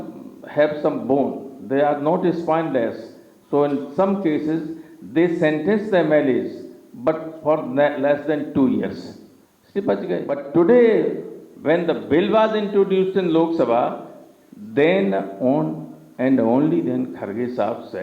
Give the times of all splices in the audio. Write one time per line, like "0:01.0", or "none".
0:10.3